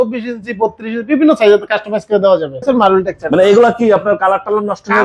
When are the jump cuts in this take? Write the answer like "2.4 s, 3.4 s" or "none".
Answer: 2.6 s